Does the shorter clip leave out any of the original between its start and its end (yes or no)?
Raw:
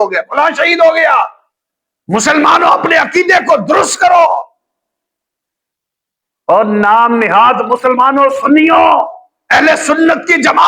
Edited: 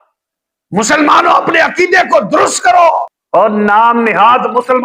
yes